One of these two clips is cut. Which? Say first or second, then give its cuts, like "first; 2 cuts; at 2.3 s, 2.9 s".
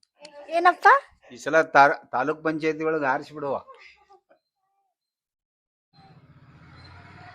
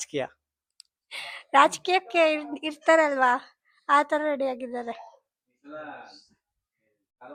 first; 1 cut; at 4.2 s